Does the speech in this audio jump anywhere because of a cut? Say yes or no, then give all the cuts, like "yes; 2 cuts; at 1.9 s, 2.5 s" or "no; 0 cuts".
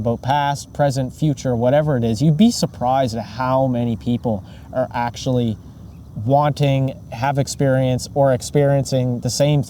no; 0 cuts